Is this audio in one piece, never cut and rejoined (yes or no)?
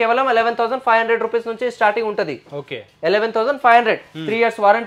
yes